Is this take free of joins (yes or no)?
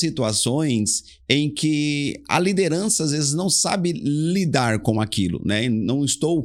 yes